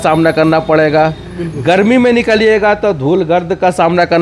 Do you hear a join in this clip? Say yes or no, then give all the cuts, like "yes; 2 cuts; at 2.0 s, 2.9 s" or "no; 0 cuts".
no; 0 cuts